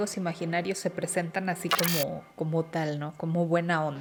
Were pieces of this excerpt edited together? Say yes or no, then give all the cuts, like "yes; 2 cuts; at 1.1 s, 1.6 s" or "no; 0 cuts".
no; 0 cuts